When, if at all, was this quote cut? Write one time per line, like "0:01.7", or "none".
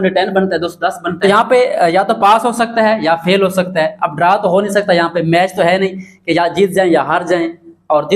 0:01.1